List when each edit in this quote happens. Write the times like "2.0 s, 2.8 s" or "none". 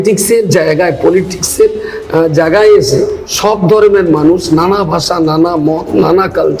none